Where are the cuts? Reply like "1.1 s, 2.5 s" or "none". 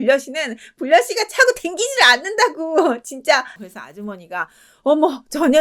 3.6 s